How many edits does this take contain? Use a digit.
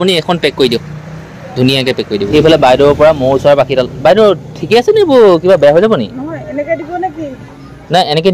1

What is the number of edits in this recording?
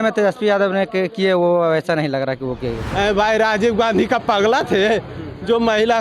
1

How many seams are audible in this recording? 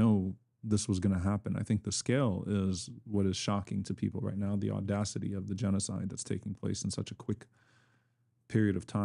0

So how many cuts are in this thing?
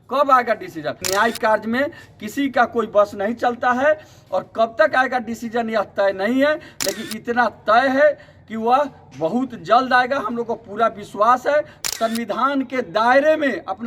2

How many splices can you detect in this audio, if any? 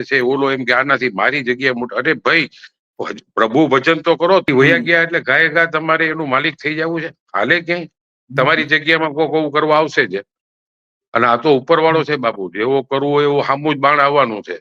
1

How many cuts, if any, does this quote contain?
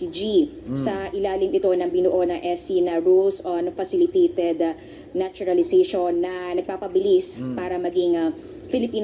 0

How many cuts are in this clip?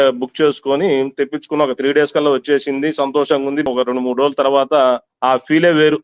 1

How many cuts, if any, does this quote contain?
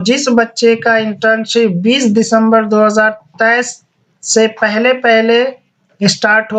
0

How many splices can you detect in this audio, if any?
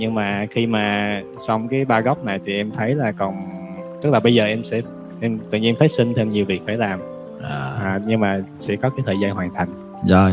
0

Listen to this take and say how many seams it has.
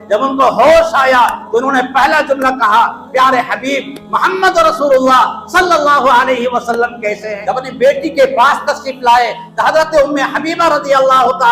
1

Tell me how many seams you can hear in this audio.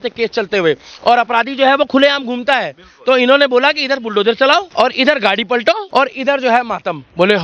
2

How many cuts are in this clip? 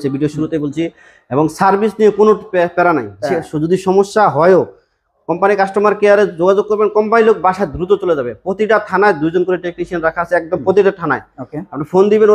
0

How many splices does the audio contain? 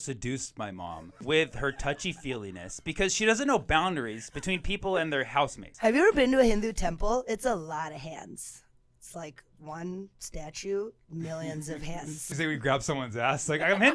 3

